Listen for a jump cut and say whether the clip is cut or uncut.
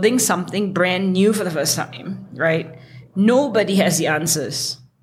uncut